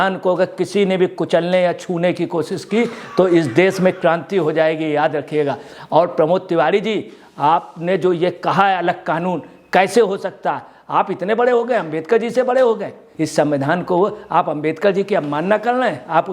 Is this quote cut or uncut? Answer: cut